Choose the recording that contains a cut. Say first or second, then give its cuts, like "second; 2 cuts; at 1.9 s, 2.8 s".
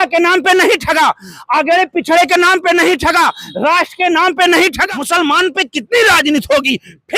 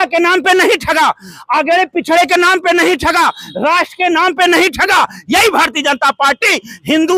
first; 1 cut; at 4.8 s